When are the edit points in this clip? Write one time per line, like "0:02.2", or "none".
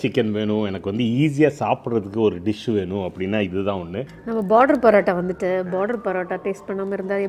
0:04.1